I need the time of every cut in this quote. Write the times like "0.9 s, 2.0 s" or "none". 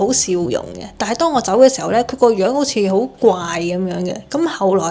none